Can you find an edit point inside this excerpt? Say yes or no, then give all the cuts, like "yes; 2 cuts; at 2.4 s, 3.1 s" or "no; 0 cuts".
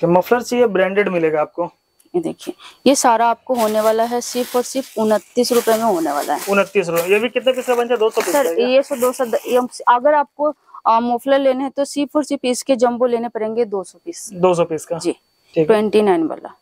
no; 0 cuts